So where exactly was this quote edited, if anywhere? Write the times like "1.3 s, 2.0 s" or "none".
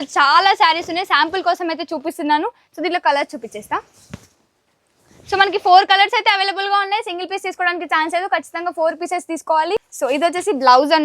9.9 s

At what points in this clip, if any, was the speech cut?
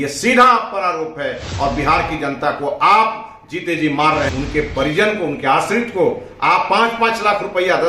1.4 s, 4.3 s

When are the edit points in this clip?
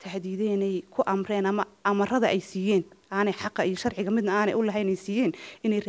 none

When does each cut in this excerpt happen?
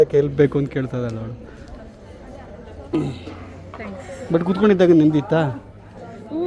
2.9 s

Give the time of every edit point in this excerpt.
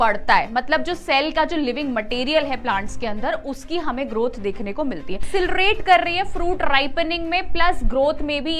5.2 s

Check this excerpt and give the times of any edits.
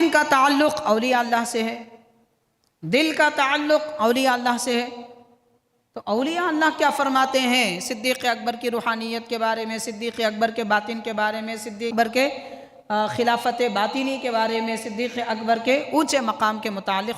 11.9 s

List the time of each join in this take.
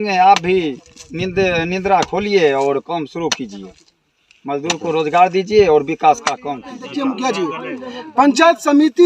6.8 s

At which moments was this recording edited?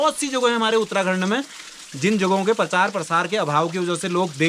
none

